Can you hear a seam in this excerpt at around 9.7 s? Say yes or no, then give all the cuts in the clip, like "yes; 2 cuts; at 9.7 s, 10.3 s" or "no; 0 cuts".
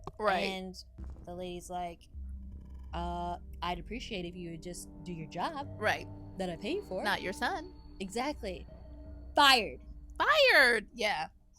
no; 1 cut; at 7.0 s